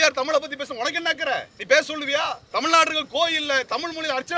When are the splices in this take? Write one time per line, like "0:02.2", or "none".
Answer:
0:01.5
0:02.4